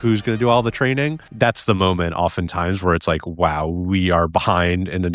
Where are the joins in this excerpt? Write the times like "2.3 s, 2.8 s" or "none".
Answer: 1.2 s